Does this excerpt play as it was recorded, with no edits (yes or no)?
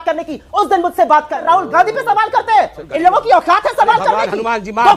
no